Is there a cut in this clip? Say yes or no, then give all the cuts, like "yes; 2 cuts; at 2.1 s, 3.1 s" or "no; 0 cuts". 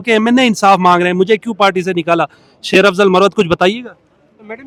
no; 0 cuts